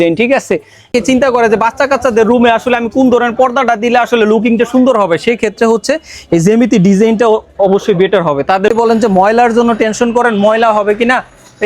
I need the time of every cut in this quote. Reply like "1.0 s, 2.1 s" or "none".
0.9 s, 8.7 s